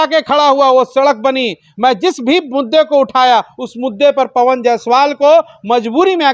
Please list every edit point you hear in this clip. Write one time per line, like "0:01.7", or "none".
none